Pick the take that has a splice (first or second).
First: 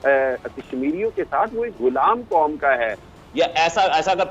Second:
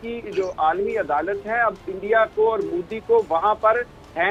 first